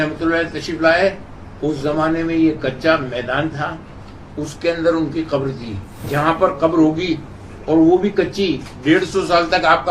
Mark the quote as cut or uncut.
cut